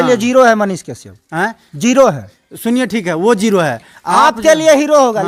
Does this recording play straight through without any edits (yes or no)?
yes